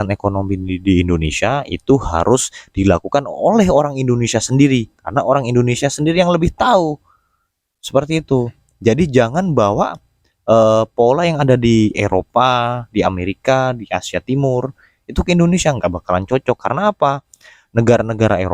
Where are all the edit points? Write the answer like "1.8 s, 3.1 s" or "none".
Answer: none